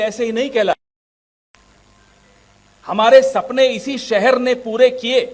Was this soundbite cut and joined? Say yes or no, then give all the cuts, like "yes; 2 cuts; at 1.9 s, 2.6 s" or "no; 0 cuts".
no; 0 cuts